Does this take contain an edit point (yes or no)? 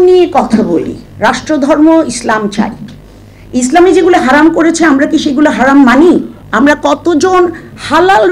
yes